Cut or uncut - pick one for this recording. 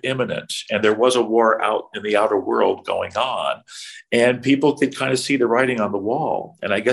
uncut